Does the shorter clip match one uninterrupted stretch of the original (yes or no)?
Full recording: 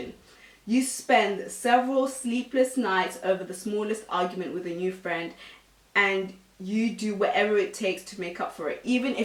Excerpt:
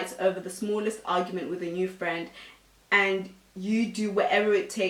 yes